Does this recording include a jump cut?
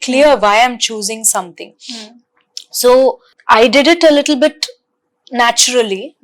yes; 1 cut; at 3.3 s

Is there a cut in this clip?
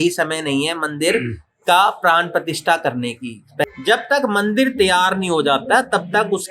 yes; 1 cut; at 3.6 s

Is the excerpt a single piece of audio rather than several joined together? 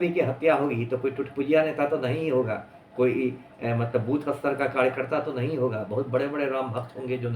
yes; 0 cuts

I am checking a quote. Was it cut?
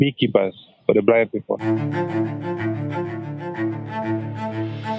yes; 1 cut; at 1.6 s

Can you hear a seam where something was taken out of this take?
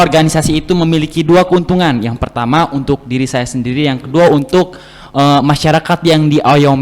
no; 0 cuts

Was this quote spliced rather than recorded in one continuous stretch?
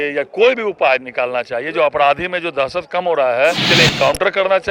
yes; 1 cut; at 3.6 s

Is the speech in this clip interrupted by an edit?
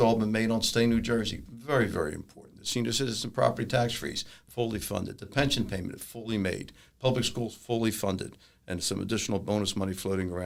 no; 0 cuts

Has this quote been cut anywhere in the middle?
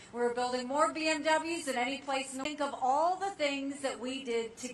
no; 0 cuts

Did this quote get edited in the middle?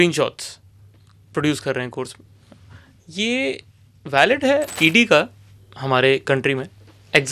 yes; 1 cut; at 4.7 s

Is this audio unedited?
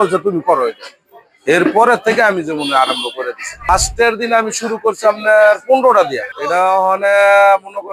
no; 2 cuts; at 3.7 s, 6.3 s

